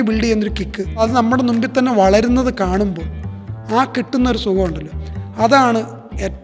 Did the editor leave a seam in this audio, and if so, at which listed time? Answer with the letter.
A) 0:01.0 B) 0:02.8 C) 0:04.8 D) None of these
A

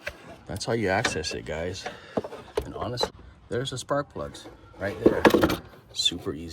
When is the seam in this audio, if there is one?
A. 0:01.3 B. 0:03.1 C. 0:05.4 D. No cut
B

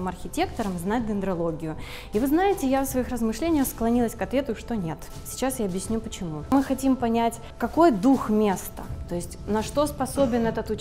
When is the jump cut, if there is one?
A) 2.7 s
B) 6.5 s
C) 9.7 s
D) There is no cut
B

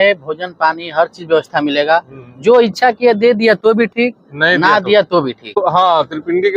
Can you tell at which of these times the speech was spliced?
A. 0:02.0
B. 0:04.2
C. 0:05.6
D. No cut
C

